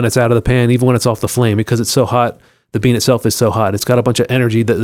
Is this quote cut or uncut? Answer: cut